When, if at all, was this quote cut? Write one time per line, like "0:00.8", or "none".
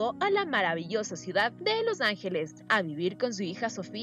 none